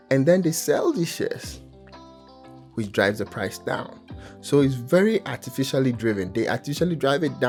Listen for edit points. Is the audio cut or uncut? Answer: uncut